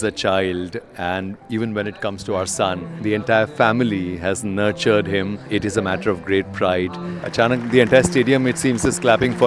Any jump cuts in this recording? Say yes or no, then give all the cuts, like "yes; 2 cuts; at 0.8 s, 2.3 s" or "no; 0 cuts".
yes; 3 cuts; at 2.9 s, 5.4 s, 7.2 s